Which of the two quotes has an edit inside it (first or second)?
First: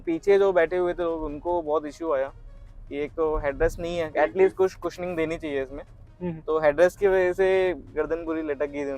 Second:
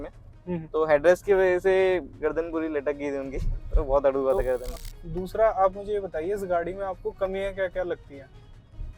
second